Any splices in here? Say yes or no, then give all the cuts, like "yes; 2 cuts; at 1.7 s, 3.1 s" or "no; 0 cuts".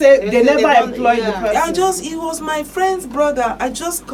no; 0 cuts